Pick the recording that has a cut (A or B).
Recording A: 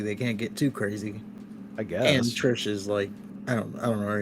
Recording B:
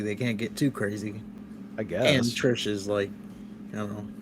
A